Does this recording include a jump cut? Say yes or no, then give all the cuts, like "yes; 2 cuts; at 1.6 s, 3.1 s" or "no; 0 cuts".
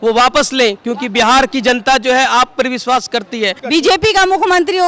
yes; 1 cut; at 3.6 s